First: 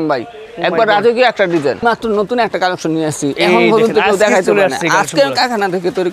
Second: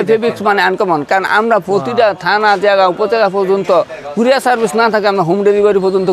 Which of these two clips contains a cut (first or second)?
first